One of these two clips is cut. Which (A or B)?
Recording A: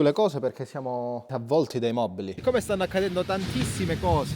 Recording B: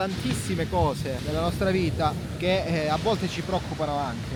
A